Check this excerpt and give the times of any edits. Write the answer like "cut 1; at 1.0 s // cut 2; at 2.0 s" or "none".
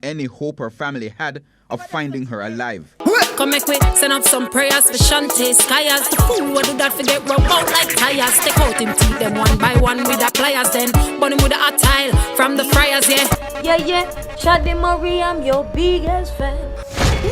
cut 1; at 13.4 s